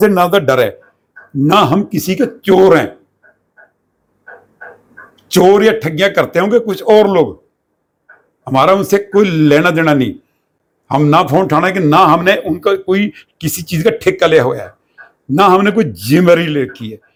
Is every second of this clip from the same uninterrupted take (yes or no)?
yes